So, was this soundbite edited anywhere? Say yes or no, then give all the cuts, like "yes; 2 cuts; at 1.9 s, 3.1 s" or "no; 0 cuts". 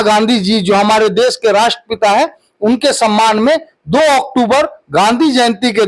no; 0 cuts